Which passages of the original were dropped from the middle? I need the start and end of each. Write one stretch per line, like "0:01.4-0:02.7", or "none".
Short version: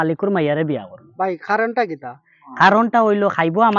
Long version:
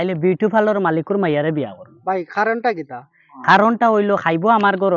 none